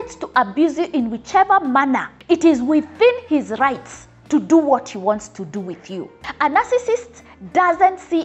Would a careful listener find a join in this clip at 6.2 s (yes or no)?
yes